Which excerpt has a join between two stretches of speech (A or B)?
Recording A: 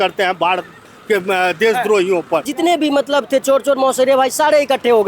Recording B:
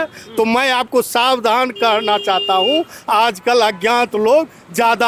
A